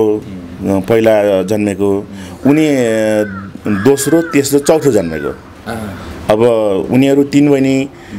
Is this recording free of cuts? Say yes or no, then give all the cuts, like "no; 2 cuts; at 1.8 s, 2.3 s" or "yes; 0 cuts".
yes; 0 cuts